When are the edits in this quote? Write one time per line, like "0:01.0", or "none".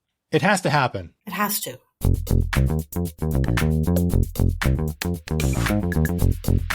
0:01.4